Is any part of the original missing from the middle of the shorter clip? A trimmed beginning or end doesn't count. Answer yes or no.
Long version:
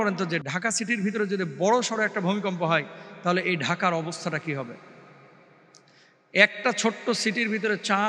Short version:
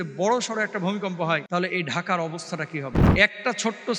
yes